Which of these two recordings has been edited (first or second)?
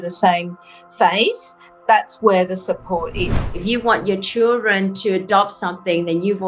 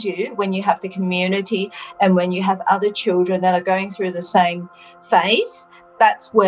first